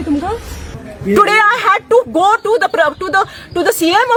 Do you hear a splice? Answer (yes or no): no